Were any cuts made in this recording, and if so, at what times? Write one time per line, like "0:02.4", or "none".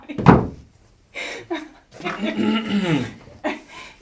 none